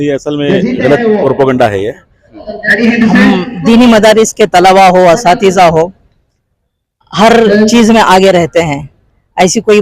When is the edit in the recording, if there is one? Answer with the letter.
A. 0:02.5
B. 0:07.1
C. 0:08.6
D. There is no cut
A